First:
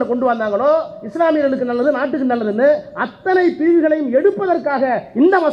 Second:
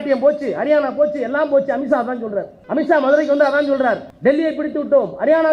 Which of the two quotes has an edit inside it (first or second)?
second